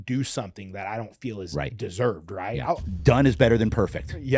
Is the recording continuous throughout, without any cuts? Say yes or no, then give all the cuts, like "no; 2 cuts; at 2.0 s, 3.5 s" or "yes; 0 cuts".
no; 1 cut; at 2.9 s